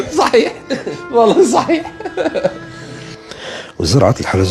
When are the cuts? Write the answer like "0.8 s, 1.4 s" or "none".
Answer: 3.2 s